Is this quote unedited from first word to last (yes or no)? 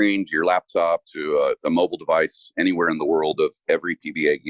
yes